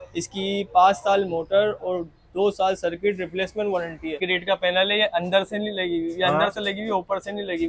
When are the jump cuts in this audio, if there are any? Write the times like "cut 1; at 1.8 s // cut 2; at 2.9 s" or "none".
cut 1; at 4.3 s